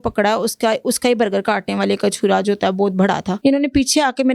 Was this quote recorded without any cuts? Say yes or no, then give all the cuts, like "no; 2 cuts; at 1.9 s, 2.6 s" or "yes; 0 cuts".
no; 1 cut; at 3.3 s